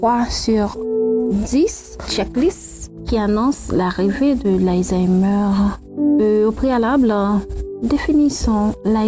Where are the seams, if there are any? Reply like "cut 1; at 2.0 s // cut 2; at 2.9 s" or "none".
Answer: cut 1; at 6.1 s